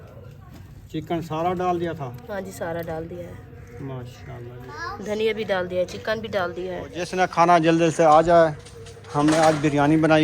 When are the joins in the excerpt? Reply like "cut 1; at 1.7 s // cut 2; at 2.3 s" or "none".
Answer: cut 1; at 7.1 s